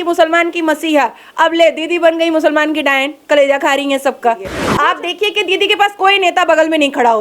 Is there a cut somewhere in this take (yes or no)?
yes